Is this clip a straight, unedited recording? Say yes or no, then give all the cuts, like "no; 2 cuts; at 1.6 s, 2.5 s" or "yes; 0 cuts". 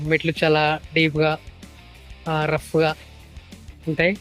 yes; 0 cuts